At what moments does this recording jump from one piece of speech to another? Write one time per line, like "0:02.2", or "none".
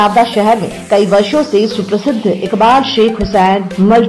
none